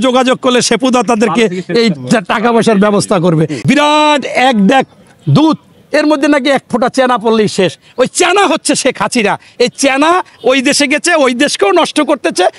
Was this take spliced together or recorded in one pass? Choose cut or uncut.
cut